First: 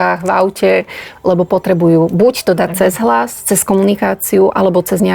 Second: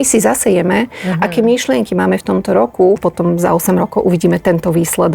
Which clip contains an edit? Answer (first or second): second